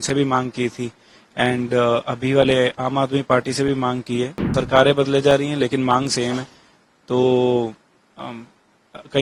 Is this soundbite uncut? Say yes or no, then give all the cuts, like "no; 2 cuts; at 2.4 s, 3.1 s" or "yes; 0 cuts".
no; 1 cut; at 4.4 s